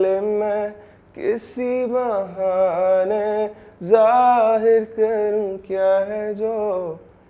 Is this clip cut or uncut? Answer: uncut